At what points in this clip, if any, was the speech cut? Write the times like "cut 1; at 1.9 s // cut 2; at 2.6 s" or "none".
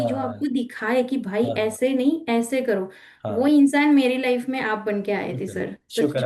none

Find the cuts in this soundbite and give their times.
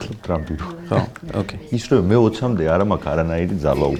none

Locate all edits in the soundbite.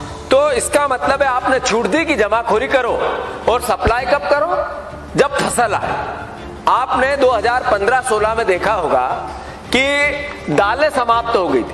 none

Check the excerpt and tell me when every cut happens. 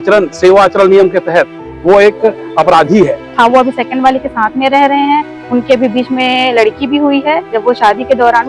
cut 1; at 3.3 s // cut 2; at 7.5 s

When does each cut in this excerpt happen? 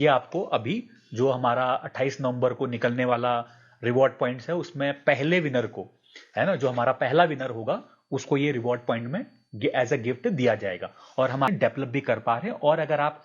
cut 1; at 11.5 s

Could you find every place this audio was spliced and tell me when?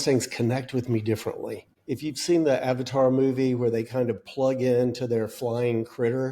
cut 1; at 1.7 s

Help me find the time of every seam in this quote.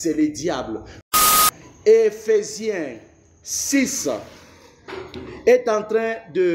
cut 1; at 1.2 s

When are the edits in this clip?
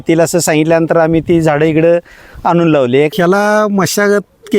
cut 1; at 3.1 s

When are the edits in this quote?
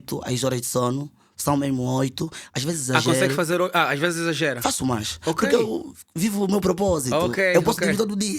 none

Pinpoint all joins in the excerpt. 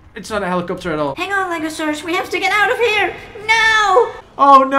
cut 1; at 1.2 s

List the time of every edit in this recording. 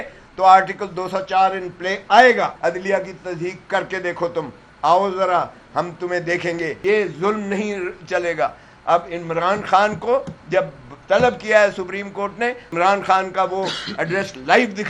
cut 1; at 2.5 s // cut 2; at 6.8 s // cut 3; at 12.7 s

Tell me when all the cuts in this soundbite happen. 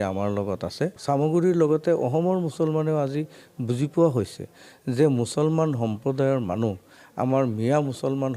cut 1; at 1.0 s

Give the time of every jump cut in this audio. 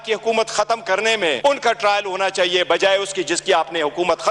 none

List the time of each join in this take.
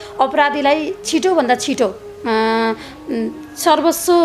none

